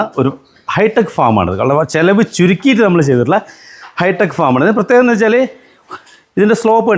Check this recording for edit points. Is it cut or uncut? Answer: uncut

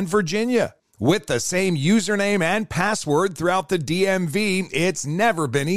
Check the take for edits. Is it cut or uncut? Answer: uncut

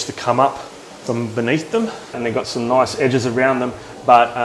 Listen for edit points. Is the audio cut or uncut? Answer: cut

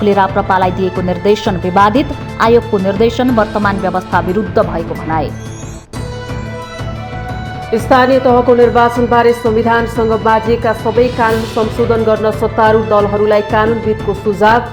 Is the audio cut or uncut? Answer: uncut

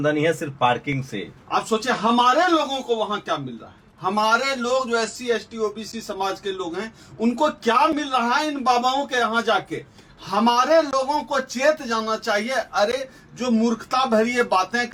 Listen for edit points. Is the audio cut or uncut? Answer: uncut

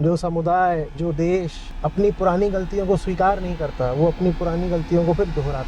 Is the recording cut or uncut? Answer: cut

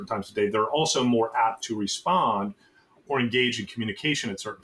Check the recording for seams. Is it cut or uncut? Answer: uncut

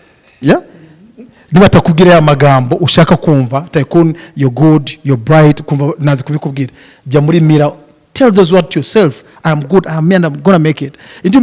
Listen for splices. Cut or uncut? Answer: uncut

